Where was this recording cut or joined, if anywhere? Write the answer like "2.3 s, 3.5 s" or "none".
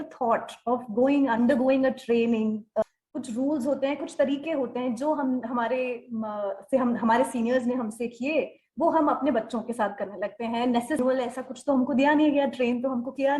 2.8 s, 11.0 s